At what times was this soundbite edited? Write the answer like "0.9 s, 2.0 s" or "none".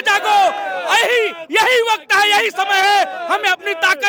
none